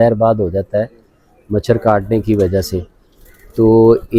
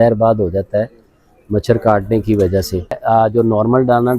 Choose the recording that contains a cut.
second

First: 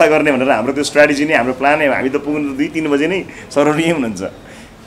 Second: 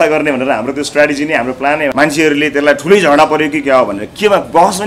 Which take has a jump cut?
second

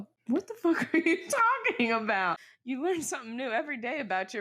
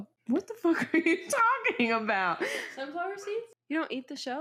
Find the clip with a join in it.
first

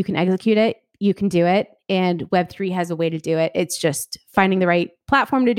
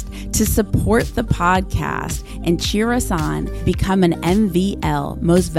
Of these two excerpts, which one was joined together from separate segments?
first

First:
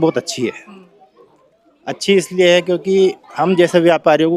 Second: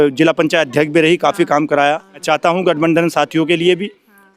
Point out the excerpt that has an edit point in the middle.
second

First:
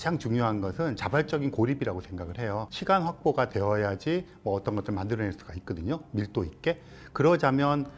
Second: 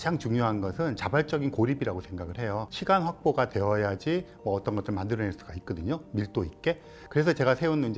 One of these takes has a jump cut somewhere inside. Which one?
second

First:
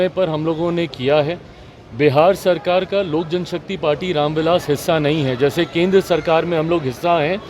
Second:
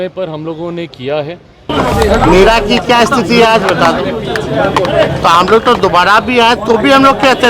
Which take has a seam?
second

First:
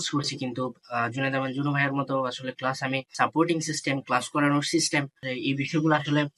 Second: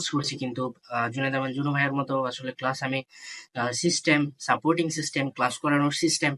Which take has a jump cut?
first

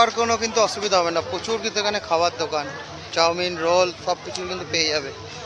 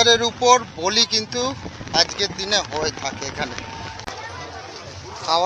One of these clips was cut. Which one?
second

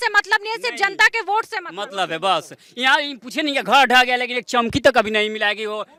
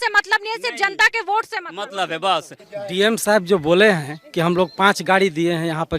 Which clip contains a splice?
second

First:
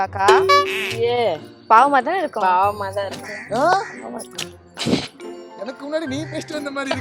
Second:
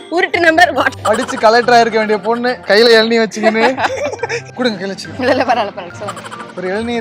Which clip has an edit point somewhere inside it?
second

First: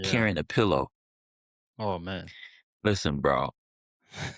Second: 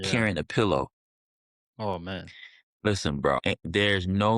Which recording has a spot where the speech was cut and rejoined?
second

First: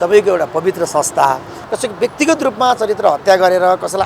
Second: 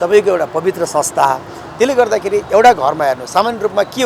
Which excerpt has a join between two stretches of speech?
first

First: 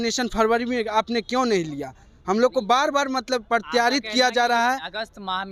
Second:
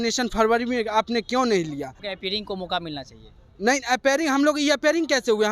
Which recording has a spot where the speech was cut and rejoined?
second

